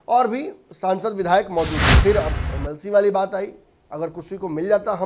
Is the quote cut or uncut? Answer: cut